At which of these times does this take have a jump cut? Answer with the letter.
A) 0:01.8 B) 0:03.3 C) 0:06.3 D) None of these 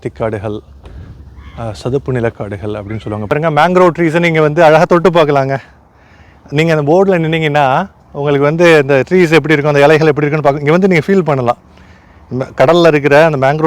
B